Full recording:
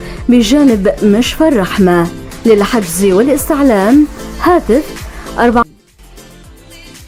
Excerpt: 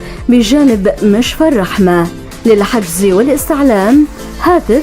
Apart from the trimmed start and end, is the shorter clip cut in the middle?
no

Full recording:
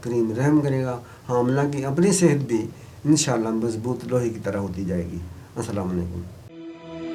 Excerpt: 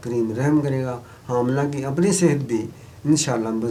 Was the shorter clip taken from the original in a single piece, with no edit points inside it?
yes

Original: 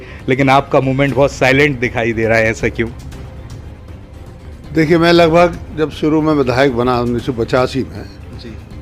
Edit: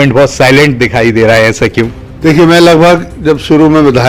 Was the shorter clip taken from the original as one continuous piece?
no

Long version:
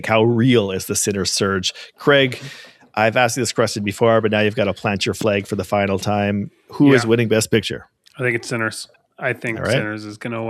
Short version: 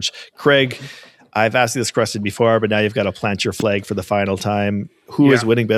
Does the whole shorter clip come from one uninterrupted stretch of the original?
yes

